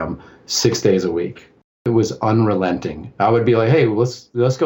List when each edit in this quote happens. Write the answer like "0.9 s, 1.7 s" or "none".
1.8 s